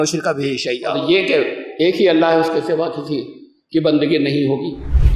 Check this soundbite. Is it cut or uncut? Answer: cut